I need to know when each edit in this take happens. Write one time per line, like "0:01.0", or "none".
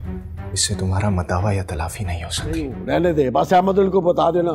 0:02.7